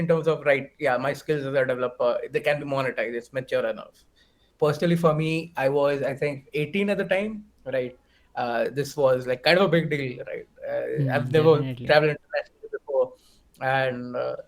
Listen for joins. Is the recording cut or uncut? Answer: cut